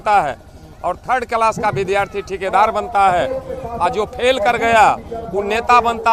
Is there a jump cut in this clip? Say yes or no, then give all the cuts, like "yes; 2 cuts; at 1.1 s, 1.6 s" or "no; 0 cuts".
no; 0 cuts